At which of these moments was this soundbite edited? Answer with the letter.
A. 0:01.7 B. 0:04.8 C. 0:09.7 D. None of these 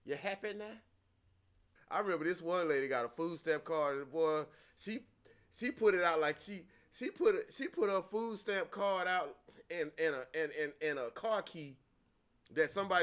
A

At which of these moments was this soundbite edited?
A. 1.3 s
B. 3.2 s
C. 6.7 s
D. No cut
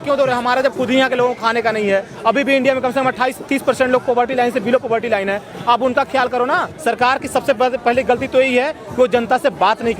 C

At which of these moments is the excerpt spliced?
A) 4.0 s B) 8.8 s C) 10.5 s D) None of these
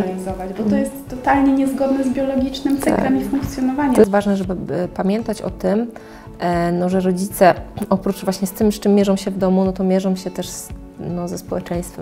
A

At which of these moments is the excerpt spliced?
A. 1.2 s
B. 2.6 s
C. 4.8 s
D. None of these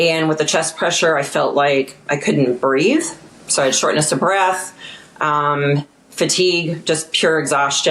D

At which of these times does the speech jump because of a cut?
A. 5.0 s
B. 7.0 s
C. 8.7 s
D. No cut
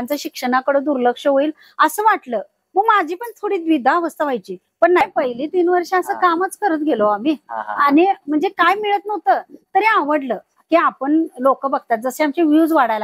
A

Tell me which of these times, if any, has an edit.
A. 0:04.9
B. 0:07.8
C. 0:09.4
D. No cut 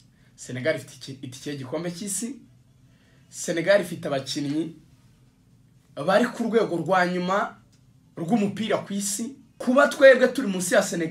C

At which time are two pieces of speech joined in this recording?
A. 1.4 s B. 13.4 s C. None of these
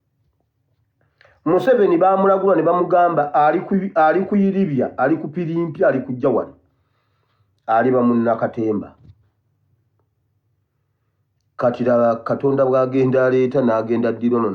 C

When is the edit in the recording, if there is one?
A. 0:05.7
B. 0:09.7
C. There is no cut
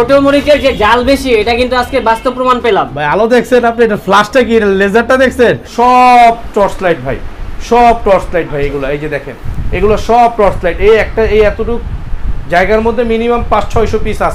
A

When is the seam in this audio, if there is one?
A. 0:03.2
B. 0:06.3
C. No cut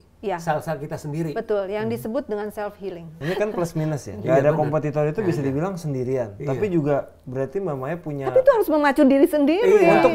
A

